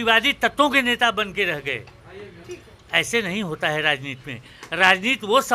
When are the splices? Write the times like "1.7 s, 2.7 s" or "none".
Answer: none